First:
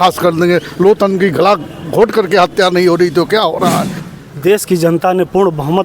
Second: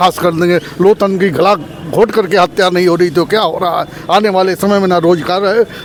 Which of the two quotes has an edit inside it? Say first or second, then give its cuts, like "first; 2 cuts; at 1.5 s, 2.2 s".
first; 1 cut; at 3.9 s